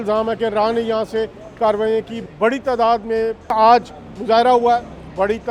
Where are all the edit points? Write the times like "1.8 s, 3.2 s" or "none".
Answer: 2.2 s